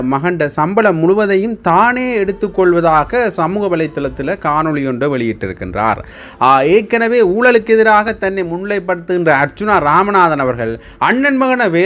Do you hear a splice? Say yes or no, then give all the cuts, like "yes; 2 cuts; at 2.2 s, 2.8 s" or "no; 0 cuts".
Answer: no; 0 cuts